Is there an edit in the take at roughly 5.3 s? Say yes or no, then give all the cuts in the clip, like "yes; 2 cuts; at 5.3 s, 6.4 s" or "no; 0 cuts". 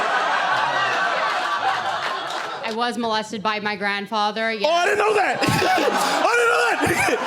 no; 1 cut; at 2.6 s